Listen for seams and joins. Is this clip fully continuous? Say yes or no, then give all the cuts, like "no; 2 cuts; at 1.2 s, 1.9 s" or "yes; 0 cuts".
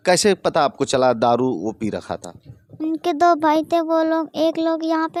yes; 0 cuts